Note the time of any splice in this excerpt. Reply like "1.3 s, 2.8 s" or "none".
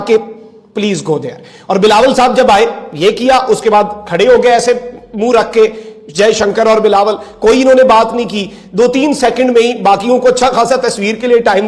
none